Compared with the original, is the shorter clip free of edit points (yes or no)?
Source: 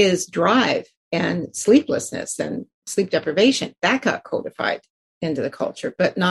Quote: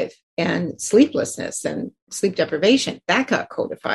yes